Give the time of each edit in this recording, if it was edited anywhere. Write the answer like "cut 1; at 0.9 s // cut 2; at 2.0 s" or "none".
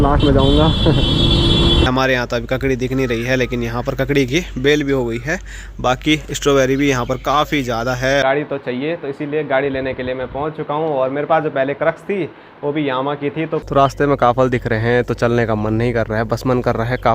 cut 1; at 1.9 s // cut 2; at 4.0 s // cut 3; at 8.2 s // cut 4; at 13.6 s